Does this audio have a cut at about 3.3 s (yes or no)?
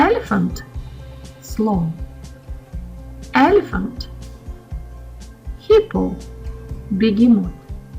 yes